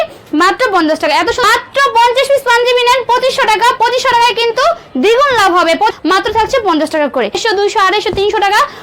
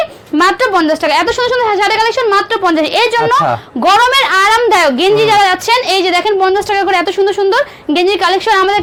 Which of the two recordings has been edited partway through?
first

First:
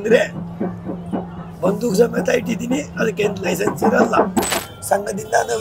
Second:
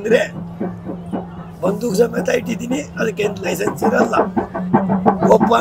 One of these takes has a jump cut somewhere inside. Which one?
first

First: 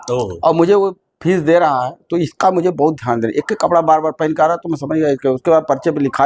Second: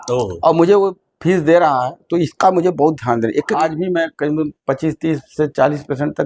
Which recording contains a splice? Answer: second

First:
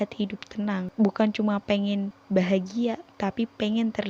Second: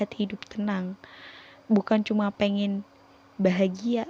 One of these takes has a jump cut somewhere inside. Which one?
first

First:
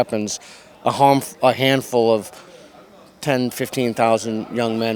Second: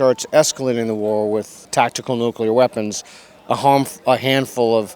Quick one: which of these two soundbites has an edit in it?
second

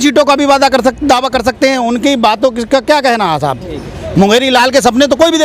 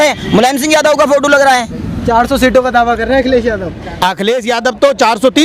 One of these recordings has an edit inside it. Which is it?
second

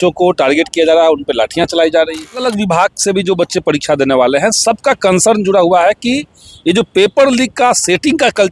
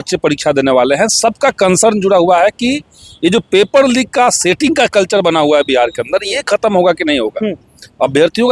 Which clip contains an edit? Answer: first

